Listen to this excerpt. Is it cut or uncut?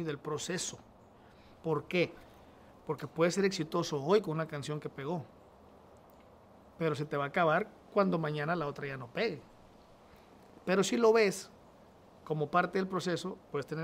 uncut